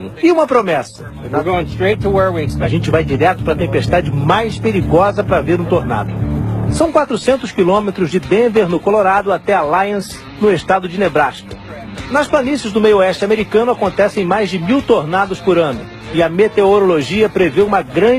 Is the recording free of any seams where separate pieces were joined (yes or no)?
no